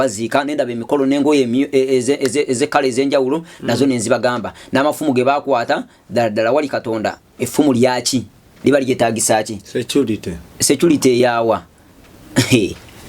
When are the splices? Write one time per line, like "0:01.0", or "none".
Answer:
none